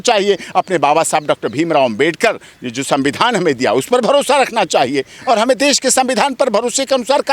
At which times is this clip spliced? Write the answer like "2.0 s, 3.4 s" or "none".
none